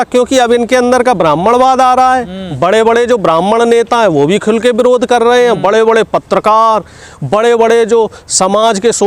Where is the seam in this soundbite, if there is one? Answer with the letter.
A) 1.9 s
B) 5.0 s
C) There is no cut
C